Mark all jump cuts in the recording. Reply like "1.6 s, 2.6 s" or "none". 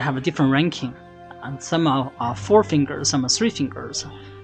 none